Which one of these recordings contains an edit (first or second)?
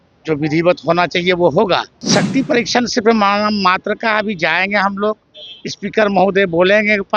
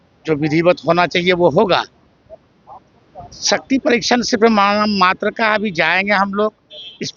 first